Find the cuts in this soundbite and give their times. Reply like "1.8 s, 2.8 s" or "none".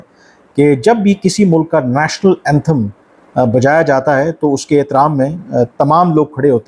none